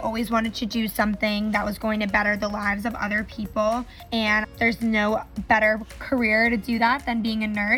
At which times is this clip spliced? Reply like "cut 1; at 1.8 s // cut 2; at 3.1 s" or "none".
cut 1; at 4.3 s